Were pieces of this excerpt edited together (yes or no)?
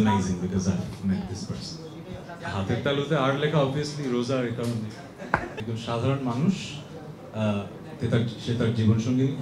yes